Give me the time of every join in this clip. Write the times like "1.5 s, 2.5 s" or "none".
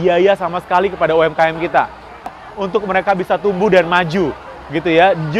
2.4 s

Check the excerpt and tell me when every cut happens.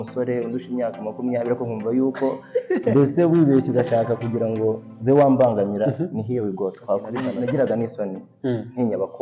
7.2 s

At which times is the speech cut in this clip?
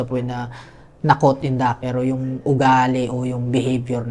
1.8 s

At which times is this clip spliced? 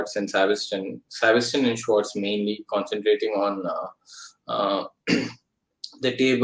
none

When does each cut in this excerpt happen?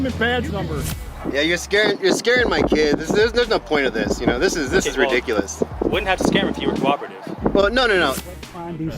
1.0 s, 8.3 s

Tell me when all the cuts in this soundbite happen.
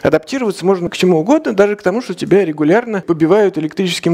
0.9 s, 3.0 s

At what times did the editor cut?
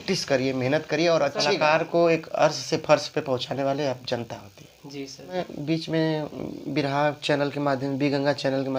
1.4 s, 5.3 s

